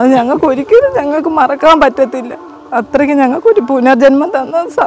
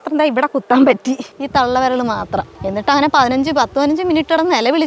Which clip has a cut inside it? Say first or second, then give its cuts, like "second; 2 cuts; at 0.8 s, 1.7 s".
second; 2 cuts; at 1.3 s, 2.6 s